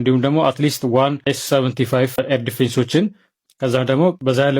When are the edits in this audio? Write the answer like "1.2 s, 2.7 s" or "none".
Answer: 3.3 s